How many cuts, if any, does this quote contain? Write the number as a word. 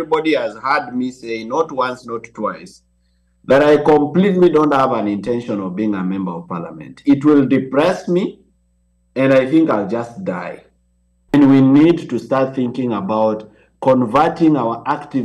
one